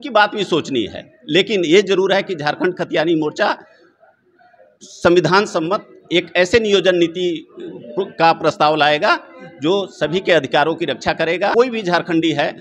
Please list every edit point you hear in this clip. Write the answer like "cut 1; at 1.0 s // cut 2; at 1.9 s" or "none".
cut 1; at 11.5 s